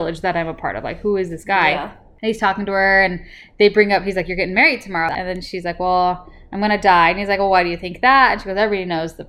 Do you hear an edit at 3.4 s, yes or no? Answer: no